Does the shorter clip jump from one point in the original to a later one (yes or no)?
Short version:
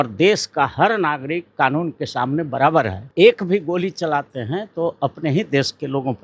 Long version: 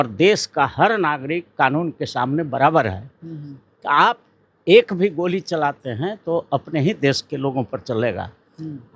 yes